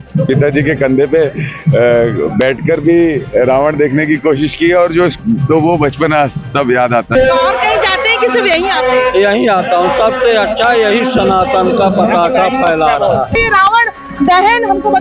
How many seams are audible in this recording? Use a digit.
3